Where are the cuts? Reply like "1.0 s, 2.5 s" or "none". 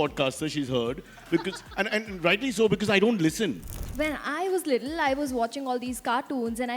3.9 s